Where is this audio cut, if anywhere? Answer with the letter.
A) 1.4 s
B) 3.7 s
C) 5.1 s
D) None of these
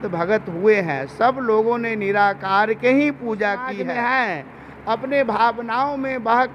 B